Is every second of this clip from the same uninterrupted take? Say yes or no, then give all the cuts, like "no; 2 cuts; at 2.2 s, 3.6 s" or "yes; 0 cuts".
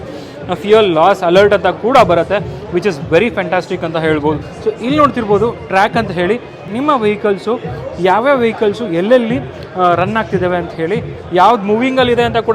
no; 2 cuts; at 4.5 s, 6.7 s